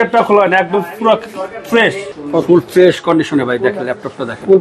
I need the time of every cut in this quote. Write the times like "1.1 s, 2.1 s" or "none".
2.1 s

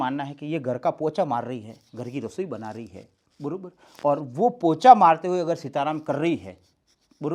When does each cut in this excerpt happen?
none

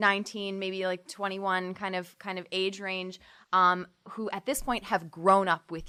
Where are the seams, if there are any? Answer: none

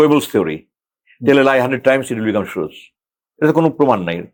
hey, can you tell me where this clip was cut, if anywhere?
none

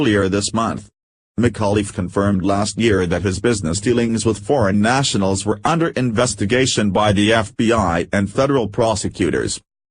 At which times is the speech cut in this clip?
2.3 s

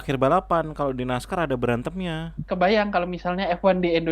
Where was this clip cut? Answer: 2.4 s

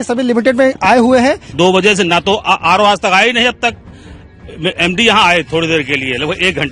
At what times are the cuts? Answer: 1.5 s

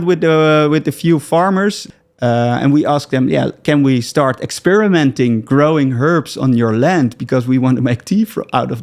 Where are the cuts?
1.8 s

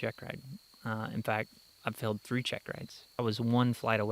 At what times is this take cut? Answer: 3.1 s

